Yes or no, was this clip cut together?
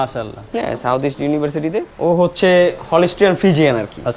yes